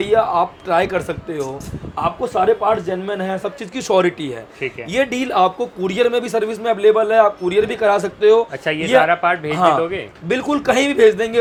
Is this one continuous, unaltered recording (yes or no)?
yes